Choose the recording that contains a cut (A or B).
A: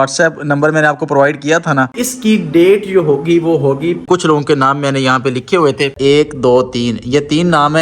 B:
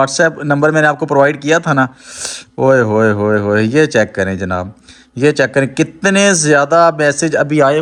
A